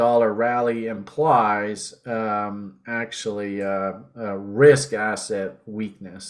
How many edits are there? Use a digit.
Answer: 0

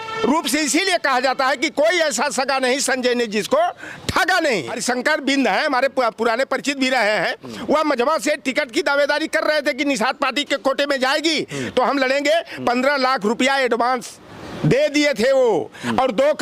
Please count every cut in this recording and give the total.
1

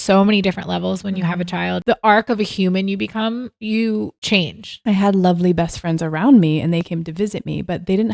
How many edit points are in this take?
3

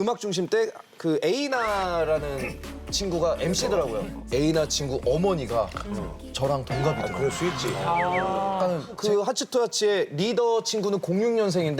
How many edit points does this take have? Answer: 1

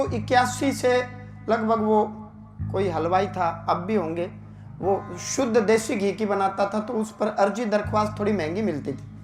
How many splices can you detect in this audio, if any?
0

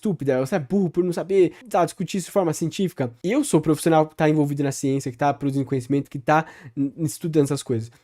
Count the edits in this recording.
2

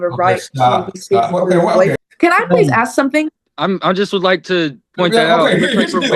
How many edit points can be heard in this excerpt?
2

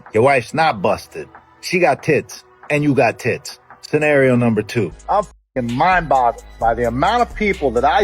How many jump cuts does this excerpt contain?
1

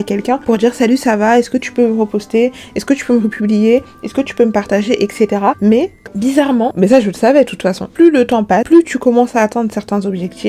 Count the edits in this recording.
1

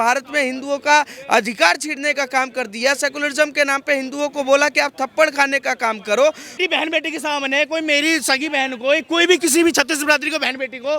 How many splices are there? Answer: 1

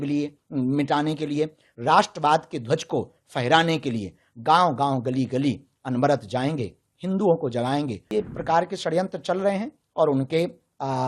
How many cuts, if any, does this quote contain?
1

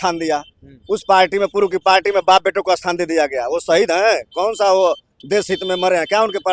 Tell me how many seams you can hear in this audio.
0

